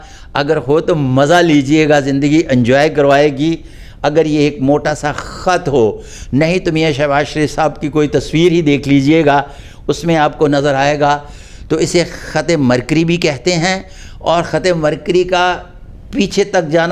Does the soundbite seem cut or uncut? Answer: uncut